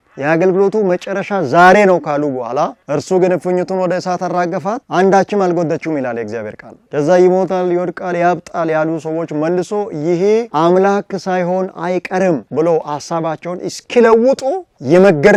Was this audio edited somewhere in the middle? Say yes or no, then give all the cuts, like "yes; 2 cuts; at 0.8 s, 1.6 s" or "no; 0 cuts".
no; 0 cuts